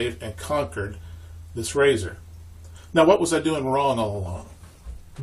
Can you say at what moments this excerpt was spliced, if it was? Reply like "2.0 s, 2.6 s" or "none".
3.6 s